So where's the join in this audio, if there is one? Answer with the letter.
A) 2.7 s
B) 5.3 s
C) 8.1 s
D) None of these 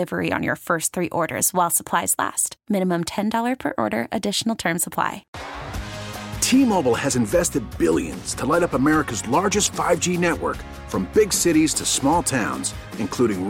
B